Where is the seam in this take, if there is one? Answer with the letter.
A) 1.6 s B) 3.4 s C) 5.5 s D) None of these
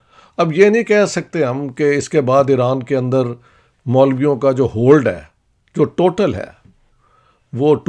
D